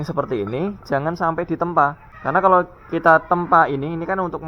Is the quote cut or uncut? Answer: cut